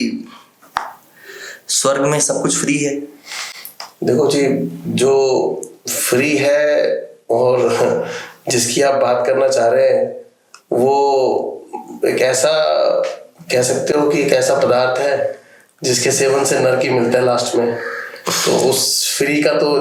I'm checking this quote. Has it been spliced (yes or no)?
no